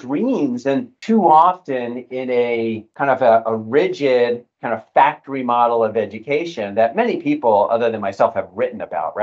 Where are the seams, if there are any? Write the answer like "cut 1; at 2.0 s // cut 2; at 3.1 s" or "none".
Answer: cut 1; at 0.9 s // cut 2; at 2.9 s